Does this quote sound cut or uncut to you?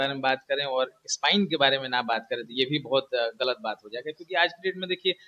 uncut